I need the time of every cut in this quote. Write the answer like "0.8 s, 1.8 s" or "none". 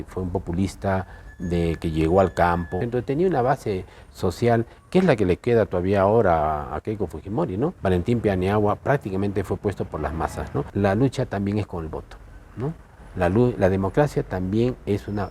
2.8 s, 7.8 s, 10.7 s